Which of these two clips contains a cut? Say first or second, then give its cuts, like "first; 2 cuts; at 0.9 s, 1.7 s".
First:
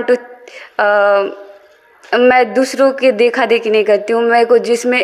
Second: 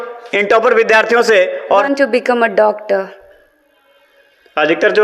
second; 1 cut; at 1.8 s